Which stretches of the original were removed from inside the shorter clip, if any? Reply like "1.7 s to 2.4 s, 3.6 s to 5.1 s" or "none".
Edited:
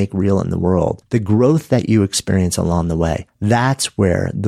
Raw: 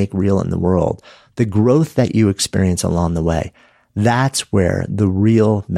1.0 s to 1.3 s, 3.5 s to 3.8 s